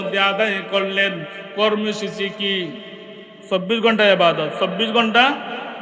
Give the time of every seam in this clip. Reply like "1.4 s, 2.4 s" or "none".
none